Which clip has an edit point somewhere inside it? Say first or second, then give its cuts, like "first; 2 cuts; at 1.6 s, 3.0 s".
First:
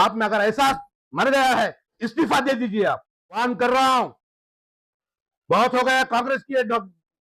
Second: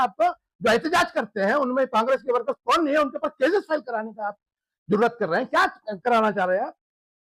first; 2 cuts; at 2.0 s, 3.3 s